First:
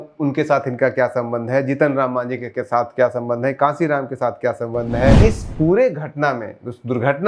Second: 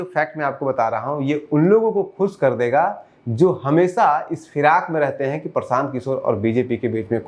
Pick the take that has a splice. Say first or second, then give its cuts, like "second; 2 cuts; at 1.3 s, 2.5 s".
first; 1 cut; at 5.2 s